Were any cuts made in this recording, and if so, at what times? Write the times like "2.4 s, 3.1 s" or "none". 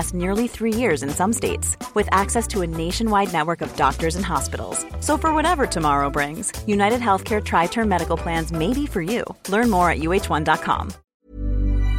11.0 s

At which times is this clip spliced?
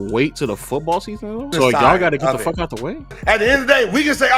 1.5 s, 3.2 s

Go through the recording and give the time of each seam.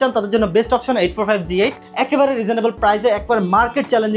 1.8 s

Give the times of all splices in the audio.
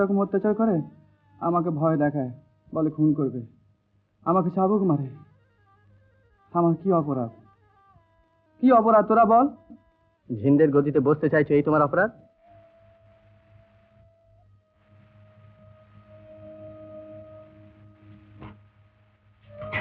none

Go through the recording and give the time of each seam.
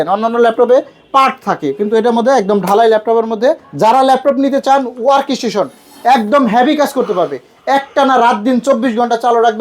3.7 s

